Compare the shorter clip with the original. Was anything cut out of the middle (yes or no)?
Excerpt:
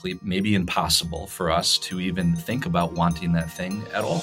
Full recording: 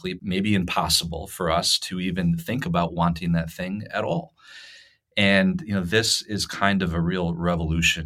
no